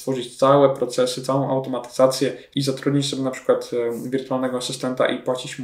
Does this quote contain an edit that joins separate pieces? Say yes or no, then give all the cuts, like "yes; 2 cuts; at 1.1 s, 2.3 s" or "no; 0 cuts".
yes; 1 cut; at 2.5 s